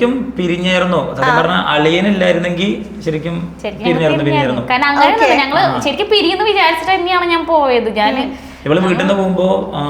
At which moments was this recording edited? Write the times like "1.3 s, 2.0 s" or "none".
none